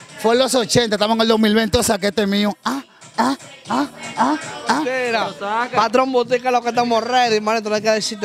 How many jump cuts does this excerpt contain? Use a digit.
1